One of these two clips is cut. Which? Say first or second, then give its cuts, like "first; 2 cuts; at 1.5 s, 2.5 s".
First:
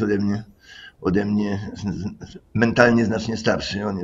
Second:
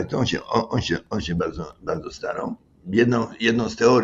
second; 1 cut; at 2.7 s